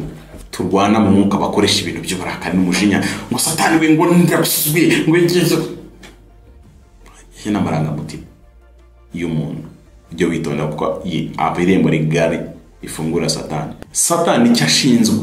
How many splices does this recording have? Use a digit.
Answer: 1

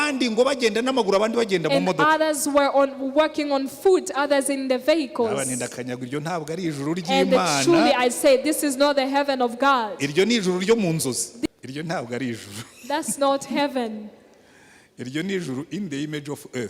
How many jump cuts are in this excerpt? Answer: 1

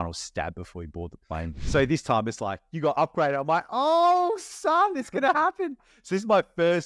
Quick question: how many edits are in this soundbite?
1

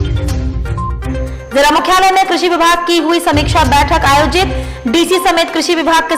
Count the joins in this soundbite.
1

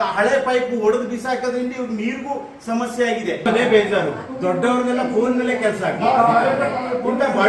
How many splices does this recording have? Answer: 1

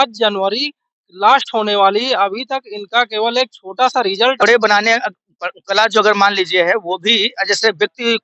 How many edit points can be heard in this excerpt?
1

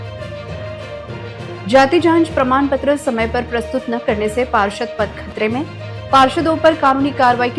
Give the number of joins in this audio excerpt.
1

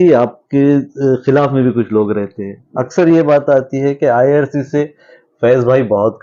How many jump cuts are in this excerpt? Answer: 0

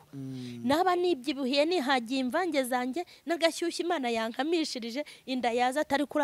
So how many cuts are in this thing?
0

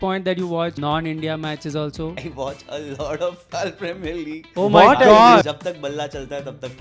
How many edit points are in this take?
4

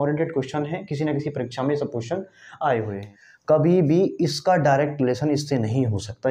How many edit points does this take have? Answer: 1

